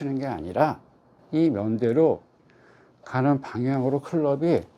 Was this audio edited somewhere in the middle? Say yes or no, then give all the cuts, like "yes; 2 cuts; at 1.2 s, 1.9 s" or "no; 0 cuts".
no; 0 cuts